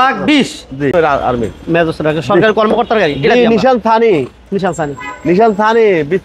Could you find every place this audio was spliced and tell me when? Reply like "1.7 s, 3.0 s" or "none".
0.9 s

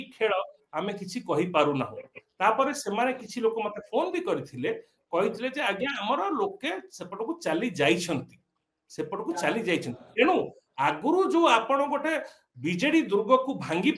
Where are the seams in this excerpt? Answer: none

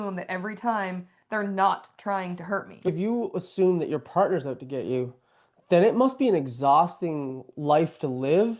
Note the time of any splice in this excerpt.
2.9 s

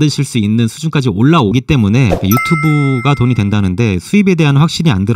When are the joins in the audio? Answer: 2.2 s

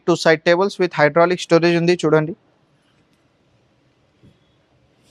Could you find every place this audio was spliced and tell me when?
none

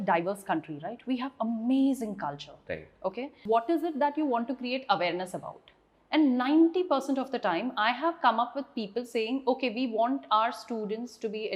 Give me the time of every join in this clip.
3.3 s

